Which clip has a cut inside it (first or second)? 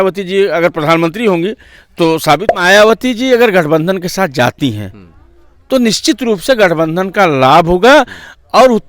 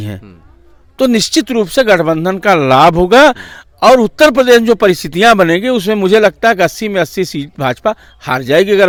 first